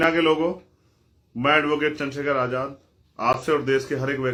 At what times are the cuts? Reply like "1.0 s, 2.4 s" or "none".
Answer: none